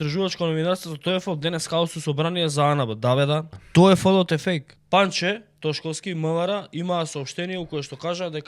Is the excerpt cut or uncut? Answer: cut